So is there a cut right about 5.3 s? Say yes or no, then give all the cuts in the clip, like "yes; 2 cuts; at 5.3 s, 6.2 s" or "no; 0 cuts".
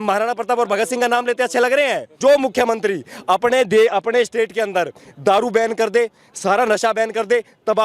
no; 1 cut; at 2.1 s